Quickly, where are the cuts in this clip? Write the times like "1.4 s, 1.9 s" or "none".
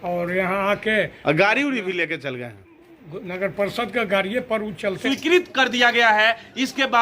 5.0 s

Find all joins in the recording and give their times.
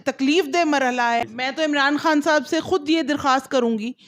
1.3 s

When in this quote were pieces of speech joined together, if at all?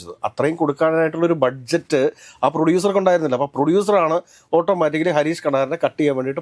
none

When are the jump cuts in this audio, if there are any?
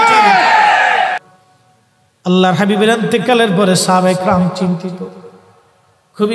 1.2 s

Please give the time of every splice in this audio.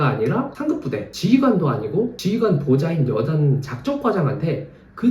0.8 s, 2.2 s

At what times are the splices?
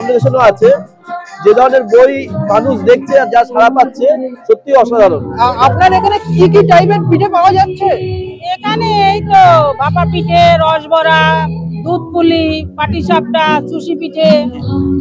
5.3 s

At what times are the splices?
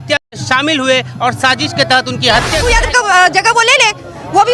2.7 s

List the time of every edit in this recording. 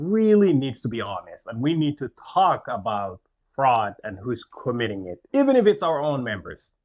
none

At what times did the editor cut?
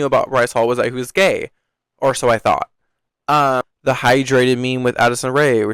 3.7 s

